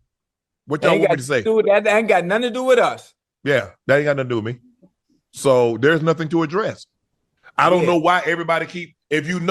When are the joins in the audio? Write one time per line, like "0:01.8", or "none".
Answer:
none